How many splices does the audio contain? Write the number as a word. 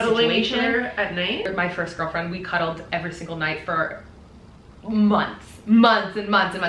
one